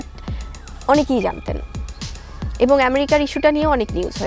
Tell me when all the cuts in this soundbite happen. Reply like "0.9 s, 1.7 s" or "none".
none